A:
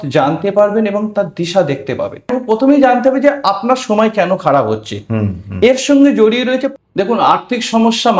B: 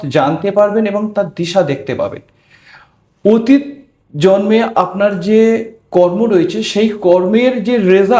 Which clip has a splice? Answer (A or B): A